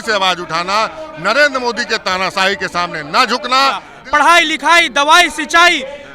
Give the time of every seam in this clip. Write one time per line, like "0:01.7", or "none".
0:03.9